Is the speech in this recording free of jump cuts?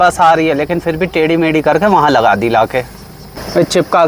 yes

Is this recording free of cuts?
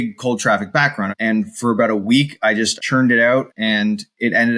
no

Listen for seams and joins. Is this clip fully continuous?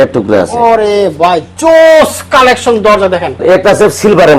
no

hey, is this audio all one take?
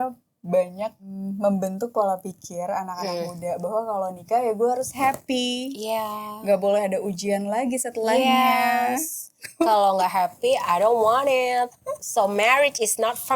no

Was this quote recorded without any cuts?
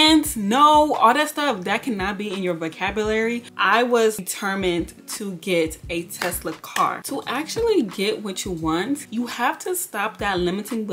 no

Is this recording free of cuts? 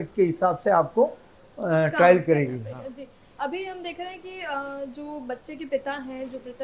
yes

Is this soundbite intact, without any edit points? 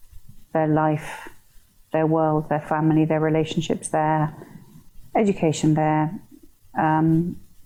yes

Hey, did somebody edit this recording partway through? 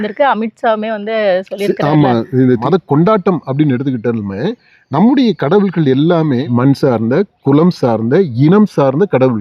yes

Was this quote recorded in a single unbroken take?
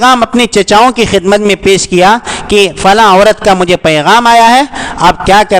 yes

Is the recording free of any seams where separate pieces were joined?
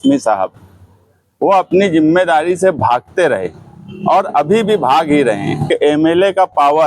no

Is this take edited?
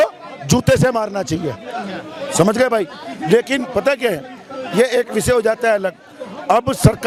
no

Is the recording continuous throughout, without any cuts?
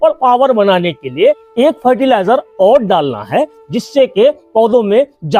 no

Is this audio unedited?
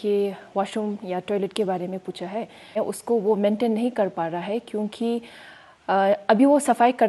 no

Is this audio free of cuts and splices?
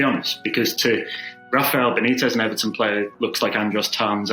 no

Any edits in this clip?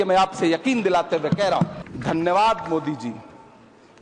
yes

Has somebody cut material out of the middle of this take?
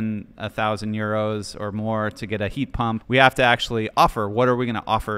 yes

